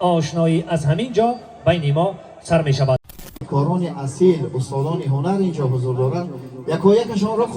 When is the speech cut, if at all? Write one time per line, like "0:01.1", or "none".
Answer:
0:03.2